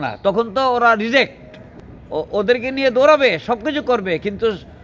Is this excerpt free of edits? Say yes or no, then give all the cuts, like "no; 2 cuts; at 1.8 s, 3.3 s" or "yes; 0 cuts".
yes; 0 cuts